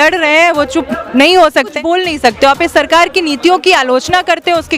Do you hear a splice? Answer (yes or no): yes